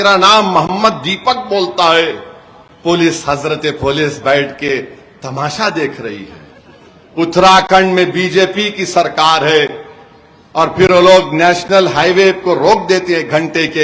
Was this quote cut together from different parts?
no; 0 cuts

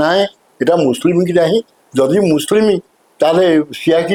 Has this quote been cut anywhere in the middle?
no; 0 cuts

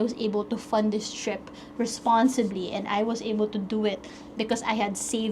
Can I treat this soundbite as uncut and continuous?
yes; 0 cuts

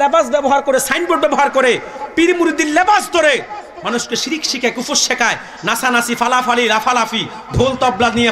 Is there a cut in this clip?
no; 0 cuts

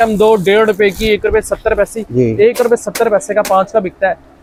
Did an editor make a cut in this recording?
no; 0 cuts

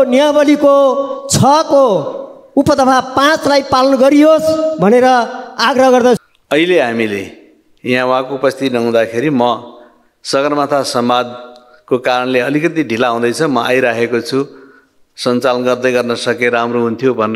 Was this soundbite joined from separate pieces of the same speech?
yes; 1 cut; at 6.2 s

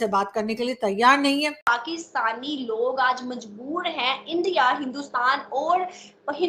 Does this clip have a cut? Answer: yes; 1 cut; at 1.6 s

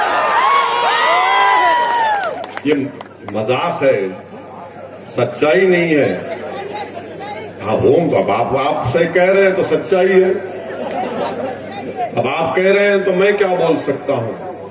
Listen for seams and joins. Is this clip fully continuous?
yes; 0 cuts

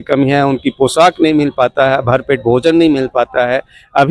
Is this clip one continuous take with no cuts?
yes; 0 cuts

